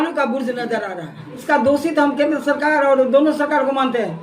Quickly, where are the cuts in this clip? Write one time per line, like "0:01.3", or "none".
0:01.4